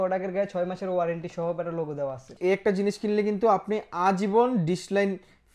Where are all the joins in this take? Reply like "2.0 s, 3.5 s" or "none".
2.3 s

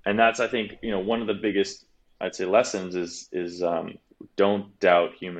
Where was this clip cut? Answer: 4.2 s

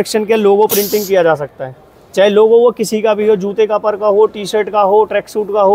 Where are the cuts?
none

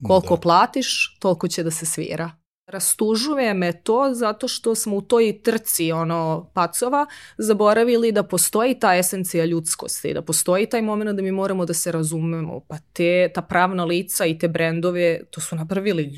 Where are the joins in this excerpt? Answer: 2.8 s

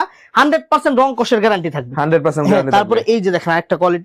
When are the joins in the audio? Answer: none

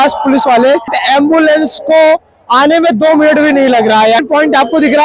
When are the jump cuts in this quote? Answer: 1.0 s, 4.2 s

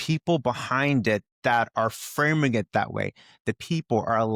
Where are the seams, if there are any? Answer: none

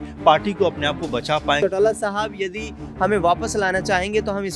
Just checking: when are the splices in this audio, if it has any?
1.6 s

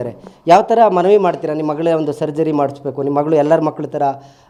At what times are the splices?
none

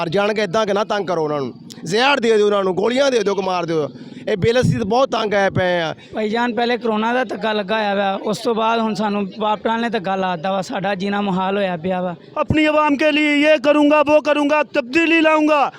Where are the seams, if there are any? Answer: 6.0 s, 12.2 s

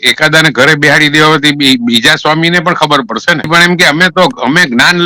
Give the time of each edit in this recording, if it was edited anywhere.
3.5 s

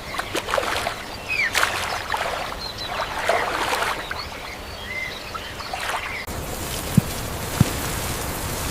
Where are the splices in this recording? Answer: none

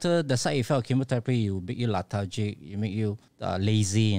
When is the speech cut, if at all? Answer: 3.3 s

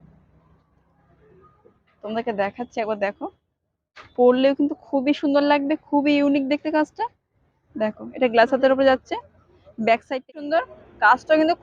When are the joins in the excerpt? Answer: 10.2 s

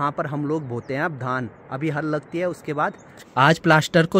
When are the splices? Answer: 3.2 s

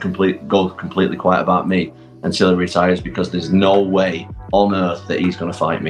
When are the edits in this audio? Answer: none

